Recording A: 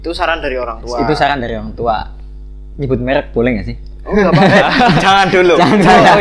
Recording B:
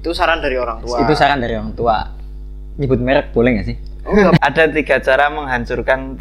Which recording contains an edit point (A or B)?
B